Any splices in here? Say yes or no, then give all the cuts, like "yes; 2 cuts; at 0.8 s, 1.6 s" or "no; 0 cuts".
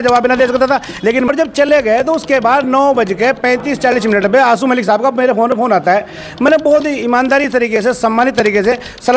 yes; 1 cut; at 1.3 s